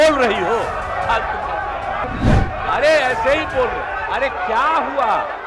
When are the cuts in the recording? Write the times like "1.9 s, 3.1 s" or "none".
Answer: 2.0 s